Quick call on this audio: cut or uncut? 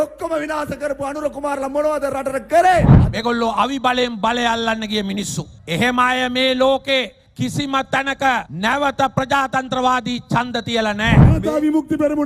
cut